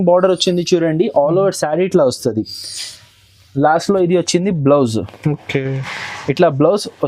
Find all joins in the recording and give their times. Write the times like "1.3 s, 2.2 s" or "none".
none